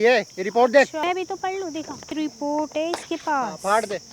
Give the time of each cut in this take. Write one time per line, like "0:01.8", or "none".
0:01.0
0:02.1